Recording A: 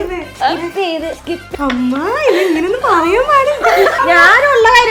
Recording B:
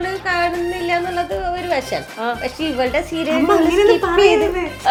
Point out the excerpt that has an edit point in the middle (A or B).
A